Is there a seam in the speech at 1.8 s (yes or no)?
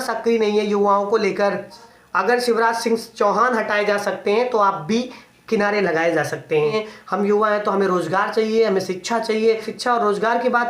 yes